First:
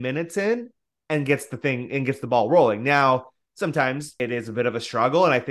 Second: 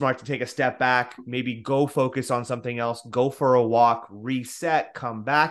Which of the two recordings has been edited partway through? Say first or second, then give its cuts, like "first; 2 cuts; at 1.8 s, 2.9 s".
first; 1 cut; at 4.1 s